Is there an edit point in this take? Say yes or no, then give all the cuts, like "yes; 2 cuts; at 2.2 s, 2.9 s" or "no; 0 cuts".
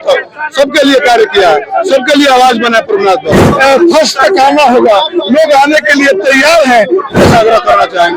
yes; 2 cuts; at 3.4 s, 7.2 s